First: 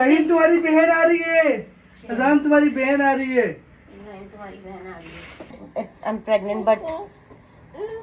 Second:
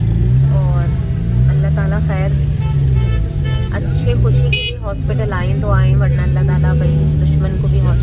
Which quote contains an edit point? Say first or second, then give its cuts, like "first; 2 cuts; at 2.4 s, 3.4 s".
first; 1 cut; at 5.6 s